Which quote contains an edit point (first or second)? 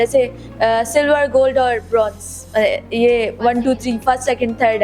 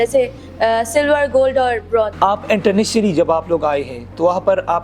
second